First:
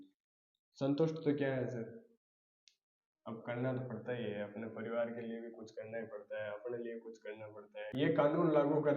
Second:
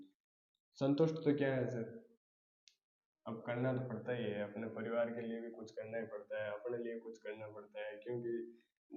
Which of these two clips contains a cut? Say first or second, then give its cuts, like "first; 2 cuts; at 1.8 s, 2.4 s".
first; 1 cut; at 7.9 s